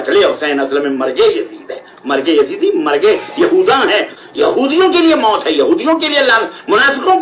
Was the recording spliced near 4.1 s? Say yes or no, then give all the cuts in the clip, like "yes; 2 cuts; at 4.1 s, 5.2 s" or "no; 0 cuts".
yes; 1 cut; at 4.1 s